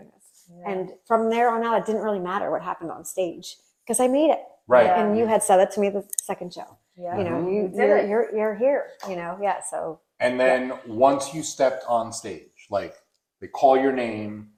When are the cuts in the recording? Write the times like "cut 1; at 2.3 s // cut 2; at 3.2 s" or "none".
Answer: none